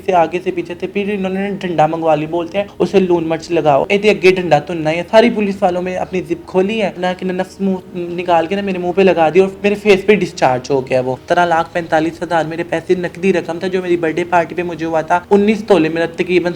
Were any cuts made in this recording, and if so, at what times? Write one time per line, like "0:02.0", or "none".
0:02.7
0:03.8
0:05.0
0:07.0
0:11.2
0:15.2